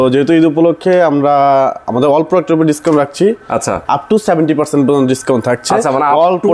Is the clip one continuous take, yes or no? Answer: yes